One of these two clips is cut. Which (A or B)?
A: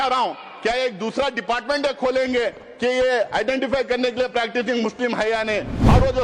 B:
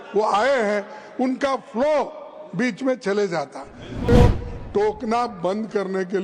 B